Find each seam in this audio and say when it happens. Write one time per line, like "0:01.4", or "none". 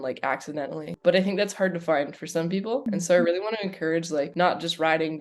0:00.9
0:02.8
0:04.3